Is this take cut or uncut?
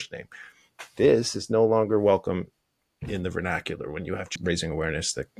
cut